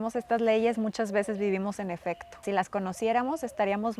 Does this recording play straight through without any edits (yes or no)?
no